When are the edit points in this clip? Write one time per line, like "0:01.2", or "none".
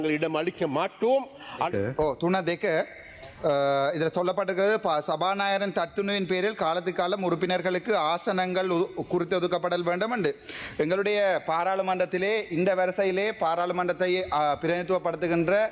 0:01.7

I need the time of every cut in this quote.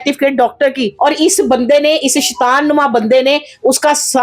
0:00.9

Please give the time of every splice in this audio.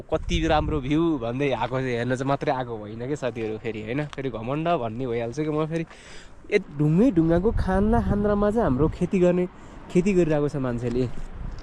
0:06.6

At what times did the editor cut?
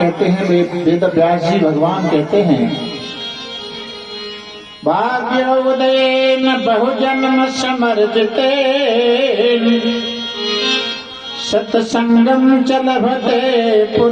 0:06.1

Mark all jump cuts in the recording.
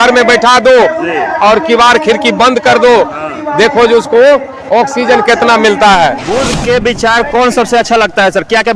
0:06.2

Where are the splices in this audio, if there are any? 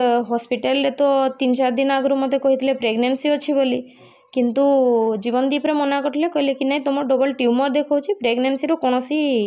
none

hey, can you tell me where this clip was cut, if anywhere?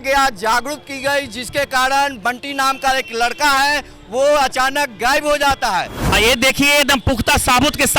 0:06.1

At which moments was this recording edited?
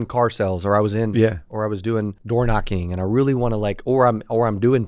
0:02.2

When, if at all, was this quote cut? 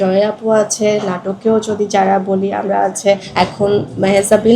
0:03.3

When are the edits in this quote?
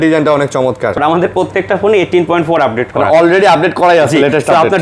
0:01.0

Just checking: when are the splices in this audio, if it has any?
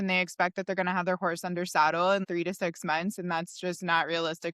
0:02.2

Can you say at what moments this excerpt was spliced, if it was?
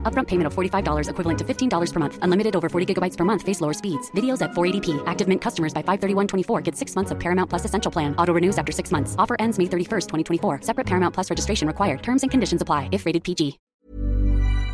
0:13.6

